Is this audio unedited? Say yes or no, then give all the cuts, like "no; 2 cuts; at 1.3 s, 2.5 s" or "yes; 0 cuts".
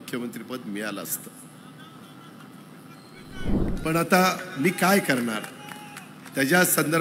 no; 1 cut; at 3.6 s